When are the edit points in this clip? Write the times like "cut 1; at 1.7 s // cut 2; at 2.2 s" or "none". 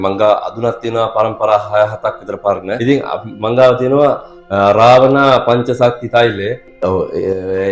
cut 1; at 2.7 s // cut 2; at 6.7 s

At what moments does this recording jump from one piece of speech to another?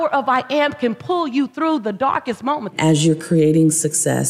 cut 1; at 2.7 s

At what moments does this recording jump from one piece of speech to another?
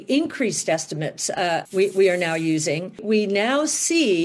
cut 1; at 3.0 s

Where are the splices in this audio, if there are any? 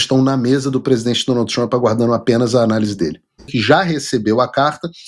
cut 1; at 3.5 s

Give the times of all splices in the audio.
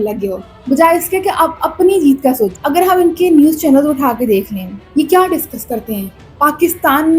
cut 1; at 2.6 s

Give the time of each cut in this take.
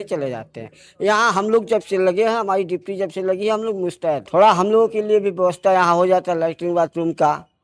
cut 1; at 4.2 s

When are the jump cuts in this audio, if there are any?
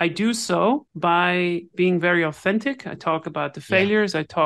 cut 1; at 0.9 s

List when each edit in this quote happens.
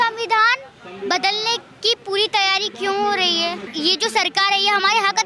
cut 1; at 3.7 s

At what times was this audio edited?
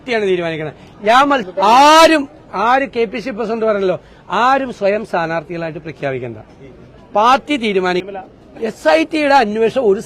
cut 1; at 1.5 s // cut 2; at 8.0 s

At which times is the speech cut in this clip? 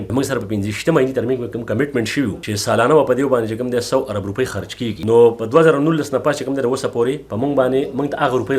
none

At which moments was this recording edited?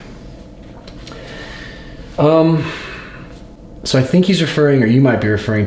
none

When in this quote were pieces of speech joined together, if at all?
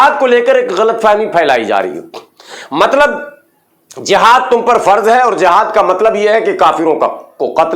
none

